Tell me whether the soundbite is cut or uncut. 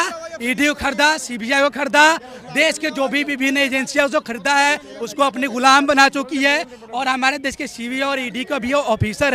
uncut